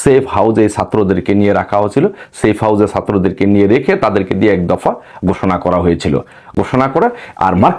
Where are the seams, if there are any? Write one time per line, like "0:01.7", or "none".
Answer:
none